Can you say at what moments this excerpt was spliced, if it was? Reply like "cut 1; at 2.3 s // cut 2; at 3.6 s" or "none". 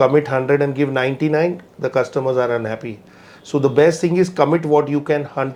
none